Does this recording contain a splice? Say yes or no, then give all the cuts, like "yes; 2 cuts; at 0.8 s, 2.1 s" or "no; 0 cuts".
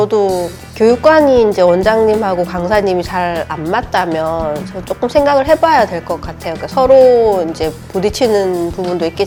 no; 0 cuts